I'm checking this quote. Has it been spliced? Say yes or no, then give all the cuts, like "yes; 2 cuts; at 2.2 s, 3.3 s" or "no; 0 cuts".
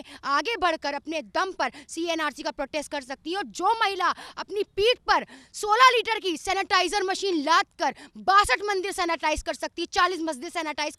no; 0 cuts